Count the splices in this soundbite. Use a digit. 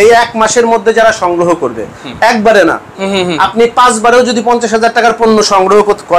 0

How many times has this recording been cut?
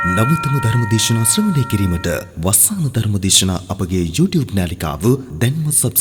0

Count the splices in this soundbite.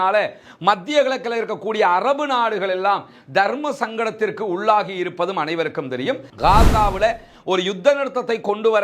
1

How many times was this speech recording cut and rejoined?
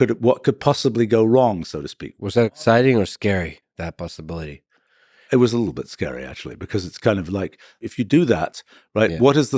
1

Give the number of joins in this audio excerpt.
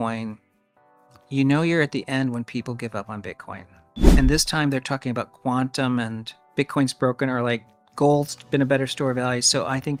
0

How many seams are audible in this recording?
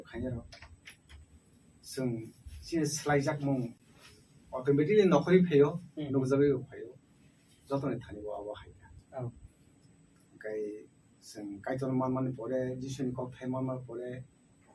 1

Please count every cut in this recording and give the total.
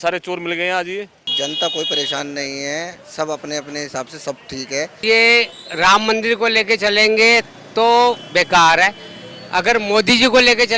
2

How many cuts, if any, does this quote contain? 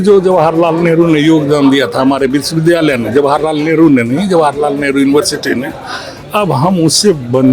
0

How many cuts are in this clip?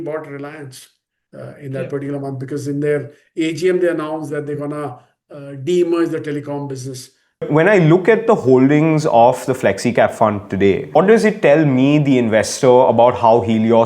2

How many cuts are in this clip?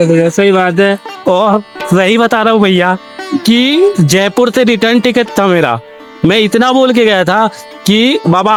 0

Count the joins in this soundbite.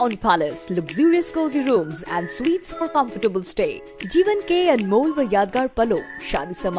0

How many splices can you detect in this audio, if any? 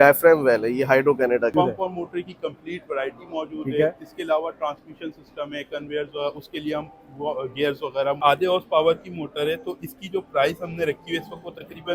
2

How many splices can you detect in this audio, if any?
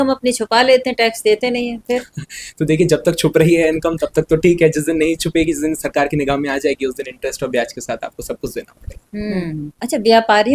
1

